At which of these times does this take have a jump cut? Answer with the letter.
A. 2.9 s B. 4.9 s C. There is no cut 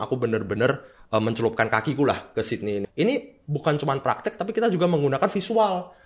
A